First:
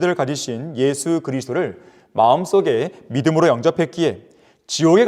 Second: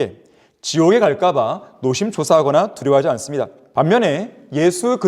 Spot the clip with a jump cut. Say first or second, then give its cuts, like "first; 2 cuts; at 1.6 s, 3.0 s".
second; 1 cut; at 3.6 s